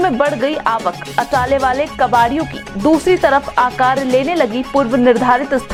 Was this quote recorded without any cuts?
yes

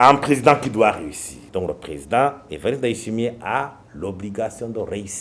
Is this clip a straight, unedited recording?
no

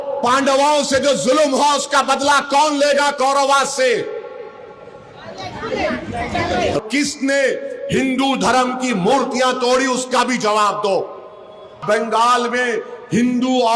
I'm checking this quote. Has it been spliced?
yes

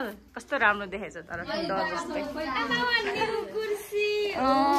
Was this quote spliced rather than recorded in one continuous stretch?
no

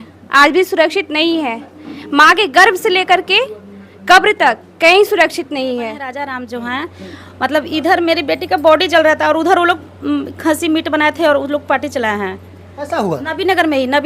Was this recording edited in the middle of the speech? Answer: yes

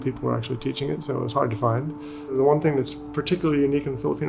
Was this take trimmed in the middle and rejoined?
yes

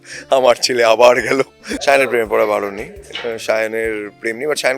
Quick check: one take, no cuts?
no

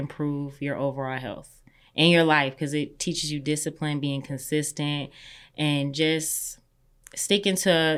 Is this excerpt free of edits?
yes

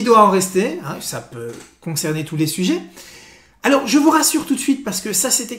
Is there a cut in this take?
yes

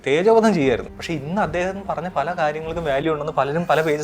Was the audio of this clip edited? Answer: yes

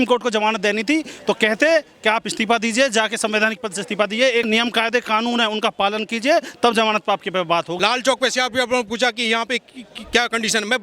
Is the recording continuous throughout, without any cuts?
no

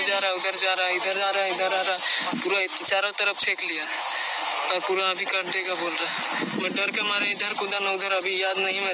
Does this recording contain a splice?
no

